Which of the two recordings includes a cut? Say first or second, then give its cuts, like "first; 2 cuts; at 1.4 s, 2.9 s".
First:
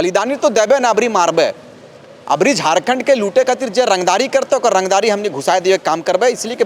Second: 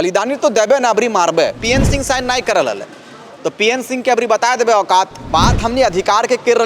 second; 2 cuts; at 1.6 s, 5.2 s